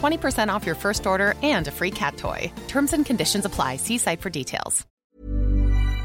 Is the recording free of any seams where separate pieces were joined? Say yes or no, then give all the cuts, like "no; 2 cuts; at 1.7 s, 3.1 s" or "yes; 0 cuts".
no; 1 cut; at 5.0 s